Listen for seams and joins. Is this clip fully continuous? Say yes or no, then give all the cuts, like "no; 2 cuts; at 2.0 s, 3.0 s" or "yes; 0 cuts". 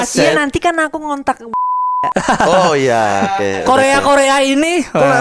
yes; 0 cuts